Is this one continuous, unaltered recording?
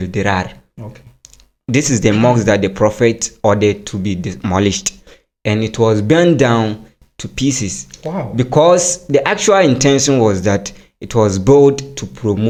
yes; 0 cuts

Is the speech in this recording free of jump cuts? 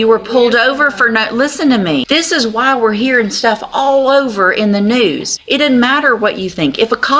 no; 2 cuts; at 2.0 s, 5.3 s

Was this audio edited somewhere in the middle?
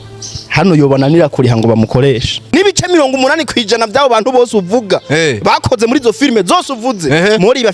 yes; 1 cut; at 2.5 s

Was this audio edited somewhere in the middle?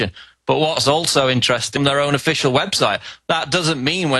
no; 0 cuts

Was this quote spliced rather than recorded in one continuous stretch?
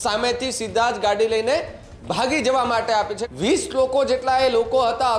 yes; 1 cut; at 3.2 s

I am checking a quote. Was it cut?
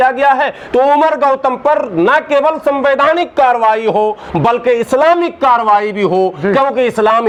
no; 0 cuts

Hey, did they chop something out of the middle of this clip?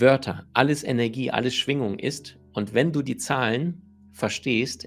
no; 0 cuts

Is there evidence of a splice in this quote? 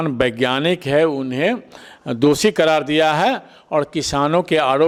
no; 0 cuts

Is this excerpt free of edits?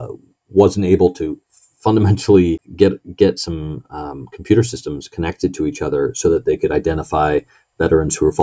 no; 1 cut; at 2.7 s

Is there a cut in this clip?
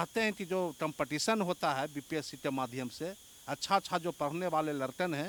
no; 0 cuts

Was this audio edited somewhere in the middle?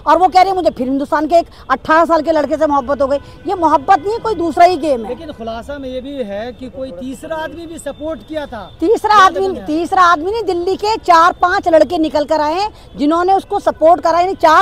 no; 0 cuts

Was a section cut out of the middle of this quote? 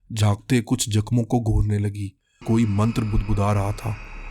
yes; 1 cut; at 2.4 s

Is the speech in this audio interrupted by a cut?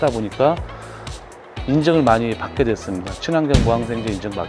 no; 0 cuts

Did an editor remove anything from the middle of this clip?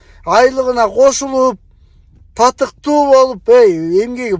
no; 0 cuts

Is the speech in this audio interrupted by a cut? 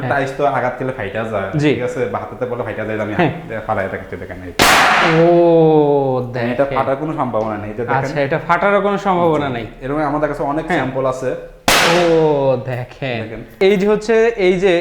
yes; 1 cut; at 13.5 s

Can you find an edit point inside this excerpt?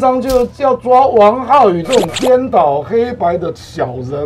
no; 0 cuts

